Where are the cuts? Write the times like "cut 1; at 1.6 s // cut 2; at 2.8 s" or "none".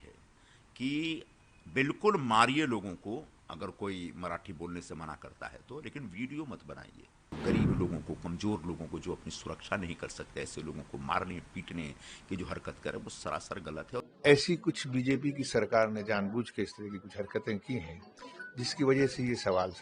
cut 1; at 7.3 s // cut 2; at 14.0 s